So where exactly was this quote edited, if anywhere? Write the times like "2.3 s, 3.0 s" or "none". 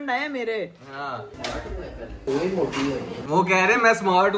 2.2 s, 3.2 s